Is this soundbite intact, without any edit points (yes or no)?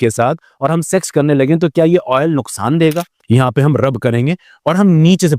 no